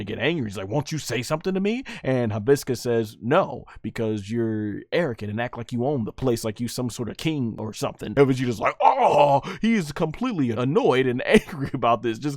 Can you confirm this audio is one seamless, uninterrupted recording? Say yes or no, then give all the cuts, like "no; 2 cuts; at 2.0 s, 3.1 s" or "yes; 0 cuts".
no; 3 cuts; at 6.1 s, 8.0 s, 10.5 s